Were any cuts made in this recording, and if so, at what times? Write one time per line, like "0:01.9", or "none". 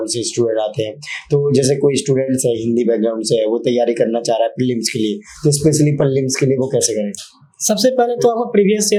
none